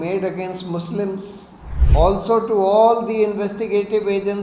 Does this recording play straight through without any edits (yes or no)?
no